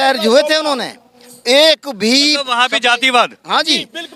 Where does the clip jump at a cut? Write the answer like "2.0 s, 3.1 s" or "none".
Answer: none